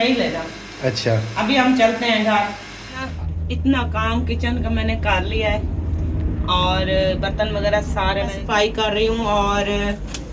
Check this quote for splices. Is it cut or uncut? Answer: cut